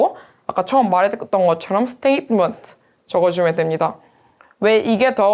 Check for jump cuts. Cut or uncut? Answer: uncut